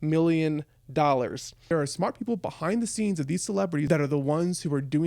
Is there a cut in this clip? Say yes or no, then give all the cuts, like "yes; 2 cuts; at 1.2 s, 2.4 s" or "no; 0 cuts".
yes; 2 cuts; at 1.7 s, 3.9 s